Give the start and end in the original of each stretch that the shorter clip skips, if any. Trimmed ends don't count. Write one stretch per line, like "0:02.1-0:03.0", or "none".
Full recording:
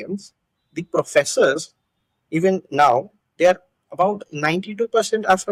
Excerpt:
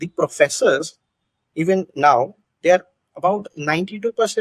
none

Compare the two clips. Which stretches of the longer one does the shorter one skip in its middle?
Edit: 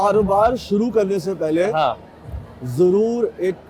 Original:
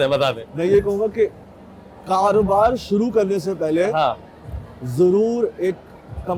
none

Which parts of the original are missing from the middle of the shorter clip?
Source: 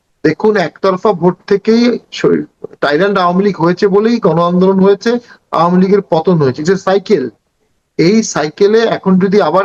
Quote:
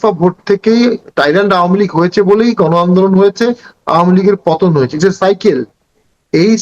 0:02.1-0:02.7

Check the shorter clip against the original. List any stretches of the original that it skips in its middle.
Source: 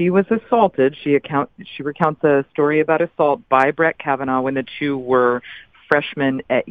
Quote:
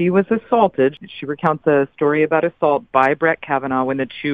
0:01.0-0:01.6

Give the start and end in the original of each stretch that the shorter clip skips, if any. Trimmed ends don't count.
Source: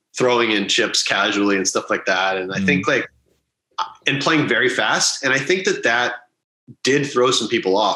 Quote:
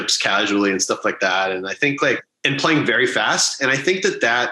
0:03.2-0:04.0

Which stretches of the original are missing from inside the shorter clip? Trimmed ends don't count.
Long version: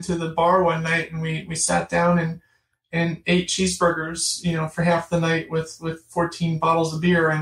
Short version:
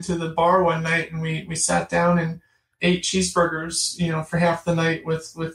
0:02.7-0:03.2

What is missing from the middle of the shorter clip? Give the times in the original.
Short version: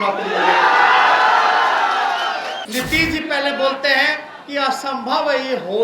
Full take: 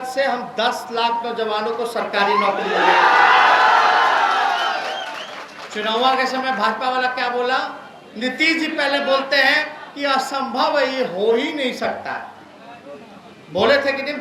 0:05.0-0:08.1

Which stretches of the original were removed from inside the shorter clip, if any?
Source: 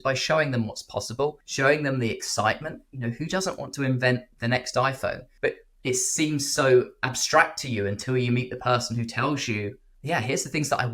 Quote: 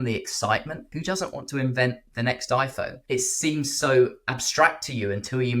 0:02.9-0:03.2
0:05.2-0:05.7

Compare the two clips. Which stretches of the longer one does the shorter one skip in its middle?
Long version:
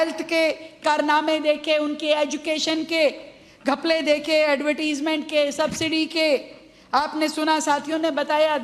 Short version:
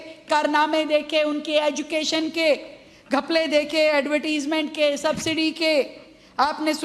none

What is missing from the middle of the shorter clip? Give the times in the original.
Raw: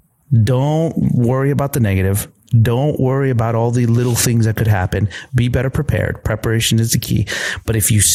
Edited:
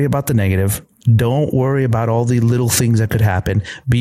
none

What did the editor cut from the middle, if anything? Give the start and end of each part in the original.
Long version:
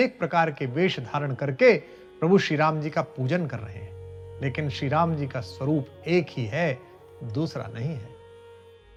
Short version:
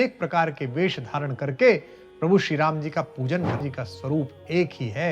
0:03.6-0:05.2

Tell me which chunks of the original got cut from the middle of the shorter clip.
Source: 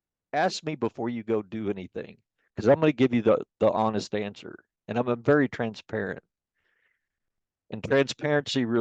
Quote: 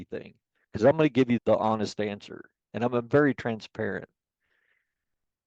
0:03.2-0:03.5

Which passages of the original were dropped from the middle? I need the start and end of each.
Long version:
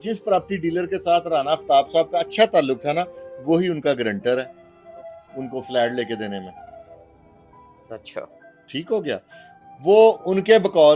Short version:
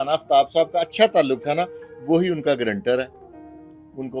none

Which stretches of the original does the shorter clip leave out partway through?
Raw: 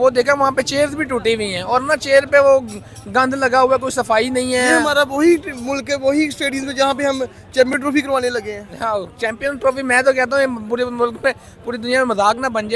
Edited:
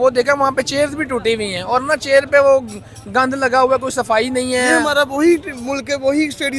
none

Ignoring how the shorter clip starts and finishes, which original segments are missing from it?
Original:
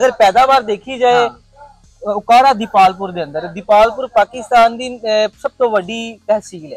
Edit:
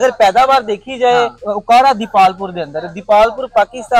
0:01.4-0:02.0

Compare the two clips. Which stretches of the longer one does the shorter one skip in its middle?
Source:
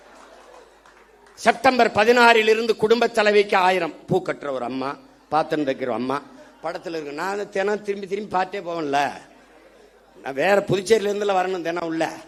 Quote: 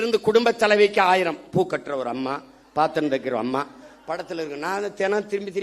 none

